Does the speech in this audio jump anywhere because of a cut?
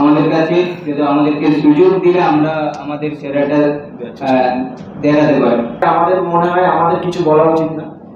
yes; 1 cut; at 5.8 s

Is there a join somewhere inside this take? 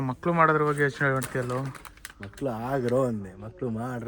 no; 0 cuts

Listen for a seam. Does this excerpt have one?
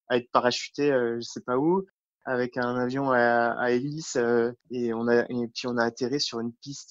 no; 0 cuts

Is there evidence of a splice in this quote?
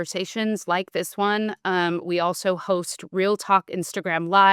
no; 0 cuts

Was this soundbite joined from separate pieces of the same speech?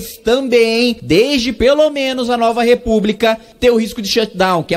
yes; 2 cuts; at 1.0 s, 3.5 s

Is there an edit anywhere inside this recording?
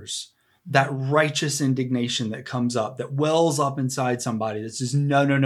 no; 0 cuts

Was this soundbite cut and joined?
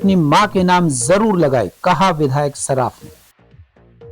yes; 1 cut; at 3.2 s

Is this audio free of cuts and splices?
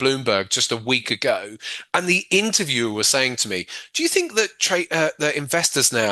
yes; 0 cuts

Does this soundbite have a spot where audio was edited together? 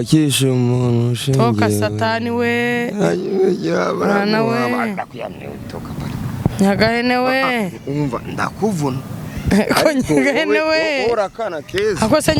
no; 0 cuts

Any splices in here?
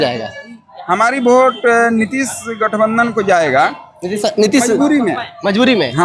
no; 0 cuts

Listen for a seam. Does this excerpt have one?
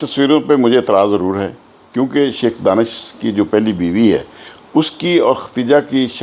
no; 0 cuts

